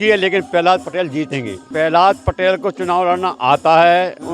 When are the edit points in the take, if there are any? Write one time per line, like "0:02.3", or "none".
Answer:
0:01.6